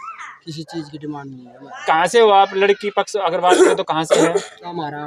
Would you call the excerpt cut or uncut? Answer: uncut